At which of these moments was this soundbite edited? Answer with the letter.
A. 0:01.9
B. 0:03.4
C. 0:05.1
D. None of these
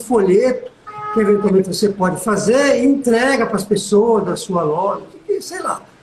D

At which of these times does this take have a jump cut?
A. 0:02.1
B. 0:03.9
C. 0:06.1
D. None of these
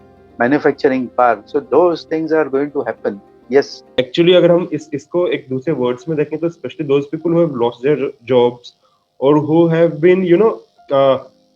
B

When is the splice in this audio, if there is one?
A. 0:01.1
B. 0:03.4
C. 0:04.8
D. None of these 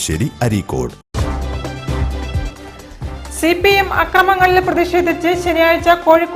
A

